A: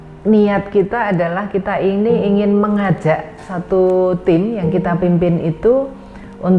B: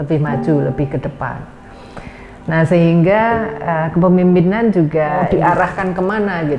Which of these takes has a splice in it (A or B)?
B